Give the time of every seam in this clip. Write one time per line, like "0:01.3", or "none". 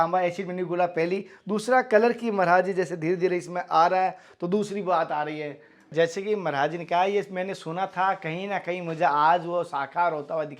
0:05.9